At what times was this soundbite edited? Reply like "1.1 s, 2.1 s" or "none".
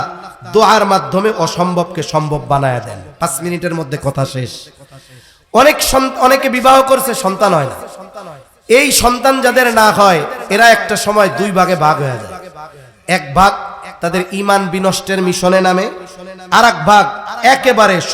none